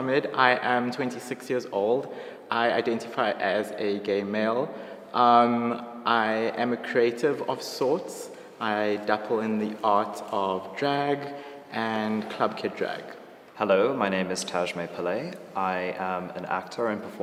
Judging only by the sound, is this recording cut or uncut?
uncut